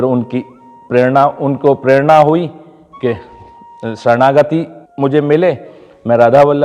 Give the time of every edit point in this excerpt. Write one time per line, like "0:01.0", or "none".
0:04.8

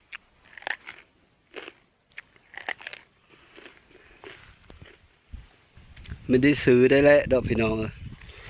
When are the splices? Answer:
0:04.8

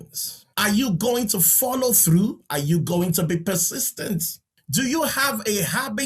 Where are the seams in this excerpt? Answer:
0:04.6

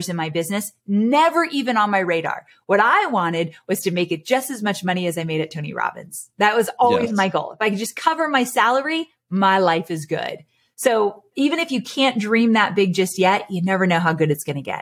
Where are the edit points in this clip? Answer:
none

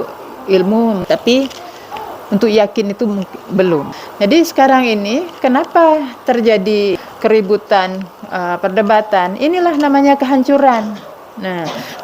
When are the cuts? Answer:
0:04.0
0:07.0

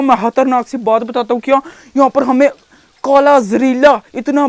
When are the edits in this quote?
none

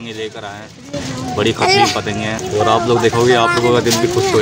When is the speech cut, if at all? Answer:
0:02.4

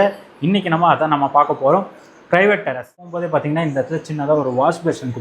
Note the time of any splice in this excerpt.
0:03.0

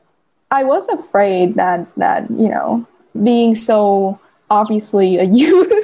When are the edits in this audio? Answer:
0:03.1
0:04.4

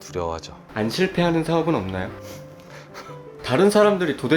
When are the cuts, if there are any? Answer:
0:03.4

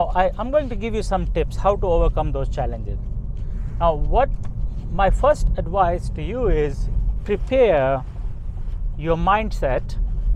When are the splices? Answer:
none

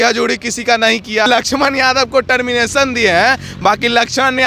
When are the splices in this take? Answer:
0:01.3

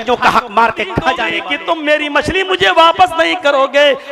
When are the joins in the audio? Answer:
0:01.3

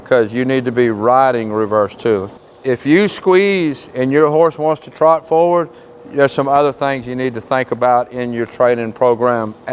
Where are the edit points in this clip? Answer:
0:02.3

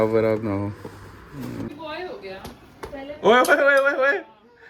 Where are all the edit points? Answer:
0:01.7

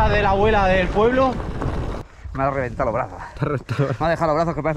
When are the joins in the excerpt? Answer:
0:02.0

